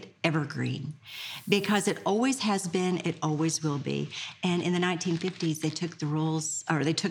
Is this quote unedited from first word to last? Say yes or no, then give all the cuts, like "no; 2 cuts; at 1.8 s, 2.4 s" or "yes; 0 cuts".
yes; 0 cuts